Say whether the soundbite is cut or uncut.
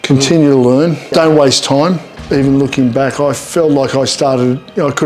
cut